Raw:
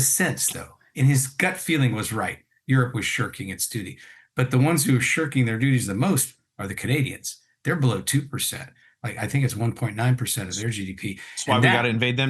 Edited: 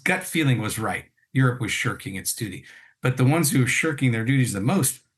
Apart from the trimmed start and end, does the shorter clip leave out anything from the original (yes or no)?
no